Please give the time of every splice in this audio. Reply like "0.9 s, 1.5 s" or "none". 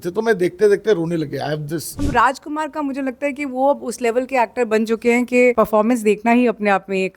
2.1 s, 5.5 s